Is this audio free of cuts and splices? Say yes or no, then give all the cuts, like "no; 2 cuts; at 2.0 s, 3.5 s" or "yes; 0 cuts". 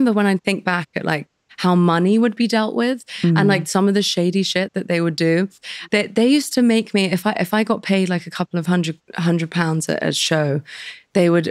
yes; 0 cuts